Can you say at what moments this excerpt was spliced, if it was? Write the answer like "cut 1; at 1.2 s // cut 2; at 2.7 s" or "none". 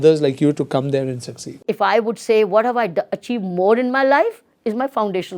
cut 1; at 1.5 s